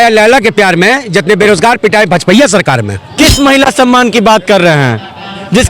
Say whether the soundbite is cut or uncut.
cut